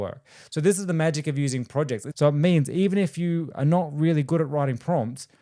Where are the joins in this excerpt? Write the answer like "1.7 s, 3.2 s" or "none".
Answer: 2.1 s